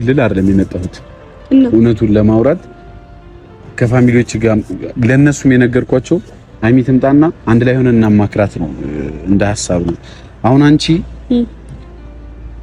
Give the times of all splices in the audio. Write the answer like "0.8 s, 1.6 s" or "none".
none